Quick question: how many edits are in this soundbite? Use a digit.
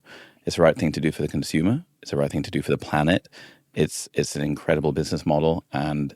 0